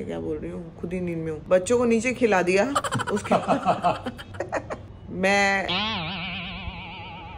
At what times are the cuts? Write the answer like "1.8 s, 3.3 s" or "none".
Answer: 4.8 s